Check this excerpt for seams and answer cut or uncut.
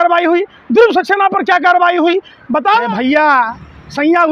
cut